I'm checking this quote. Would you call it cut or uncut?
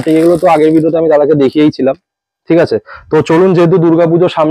uncut